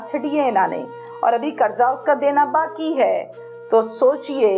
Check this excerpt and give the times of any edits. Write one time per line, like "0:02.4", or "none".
none

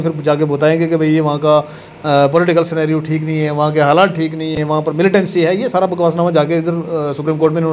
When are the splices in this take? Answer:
none

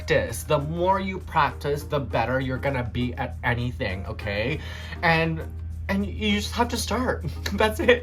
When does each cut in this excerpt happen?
none

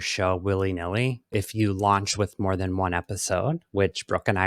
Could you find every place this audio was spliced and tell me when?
0:01.3

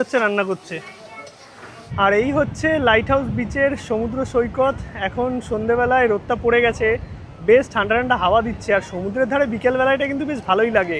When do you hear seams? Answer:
0:01.8

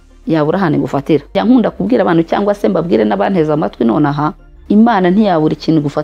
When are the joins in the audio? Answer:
0:01.4
0:04.5

